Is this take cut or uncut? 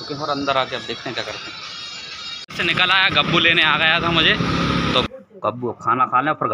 cut